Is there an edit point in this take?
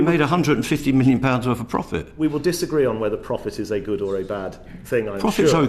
no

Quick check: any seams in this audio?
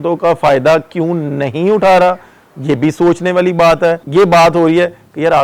yes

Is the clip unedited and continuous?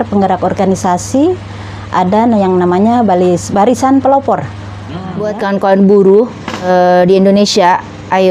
no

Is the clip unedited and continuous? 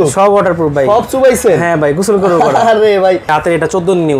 no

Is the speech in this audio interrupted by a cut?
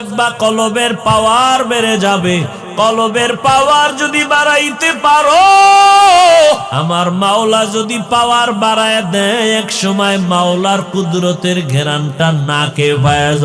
yes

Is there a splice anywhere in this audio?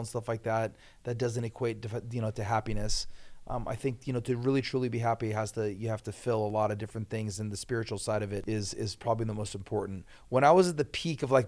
yes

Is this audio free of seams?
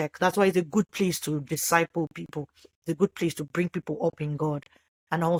yes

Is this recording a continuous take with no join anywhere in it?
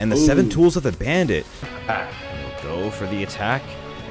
no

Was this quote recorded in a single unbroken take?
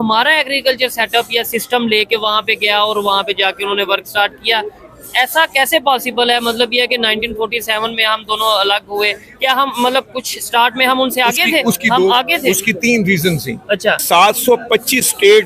no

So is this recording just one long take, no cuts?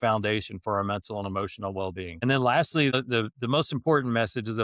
no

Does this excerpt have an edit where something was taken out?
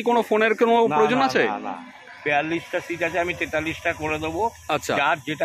no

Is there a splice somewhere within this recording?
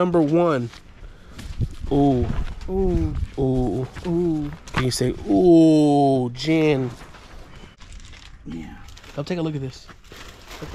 yes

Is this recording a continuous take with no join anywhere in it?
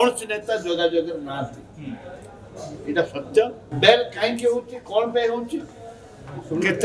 no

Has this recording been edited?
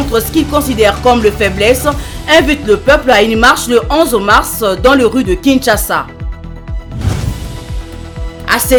no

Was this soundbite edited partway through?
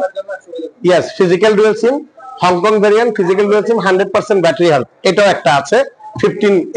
no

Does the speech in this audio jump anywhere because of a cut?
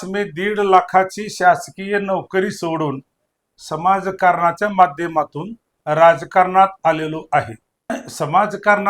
yes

